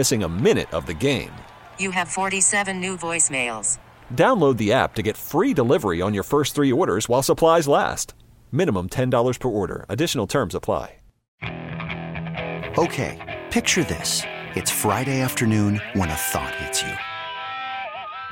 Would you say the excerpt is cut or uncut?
cut